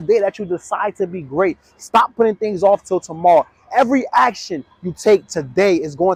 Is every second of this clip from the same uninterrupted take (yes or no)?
yes